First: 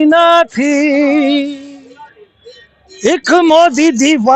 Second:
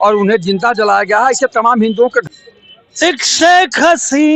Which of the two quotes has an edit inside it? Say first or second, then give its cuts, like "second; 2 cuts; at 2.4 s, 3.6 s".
second; 1 cut; at 2.3 s